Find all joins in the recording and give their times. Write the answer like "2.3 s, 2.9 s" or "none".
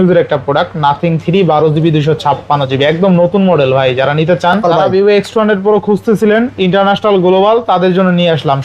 4.6 s

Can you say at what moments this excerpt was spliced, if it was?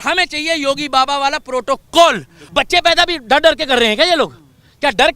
2.4 s

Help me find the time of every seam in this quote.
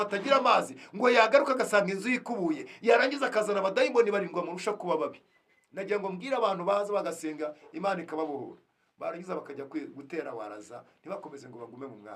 none

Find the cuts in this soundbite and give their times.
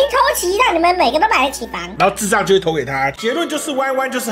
3.2 s

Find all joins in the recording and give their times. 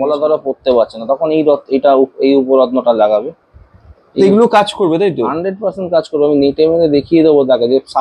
none

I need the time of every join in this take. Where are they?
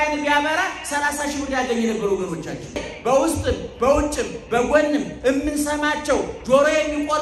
2.9 s

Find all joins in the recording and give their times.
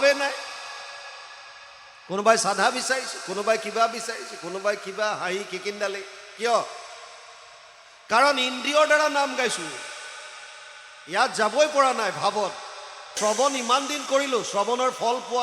13.2 s

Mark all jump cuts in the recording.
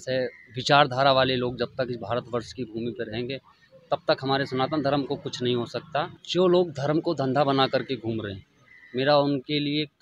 none

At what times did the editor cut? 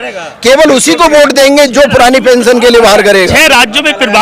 3.3 s

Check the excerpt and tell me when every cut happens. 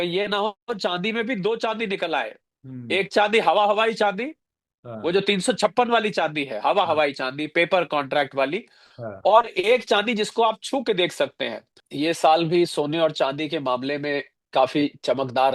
11.8 s

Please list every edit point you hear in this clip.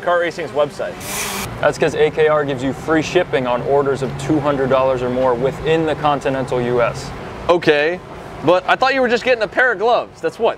none

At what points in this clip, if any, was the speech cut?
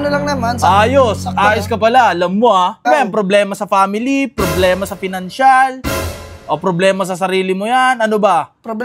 2.8 s

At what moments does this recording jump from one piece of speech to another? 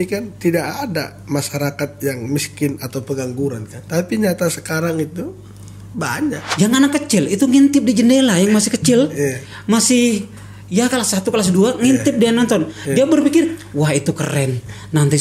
3.8 s, 6.4 s

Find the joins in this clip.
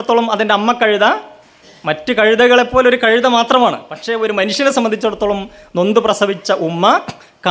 4.0 s

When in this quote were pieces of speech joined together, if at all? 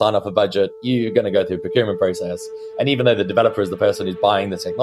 none

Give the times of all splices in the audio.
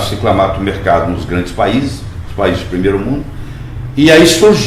none

